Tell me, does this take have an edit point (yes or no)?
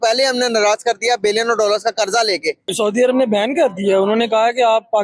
yes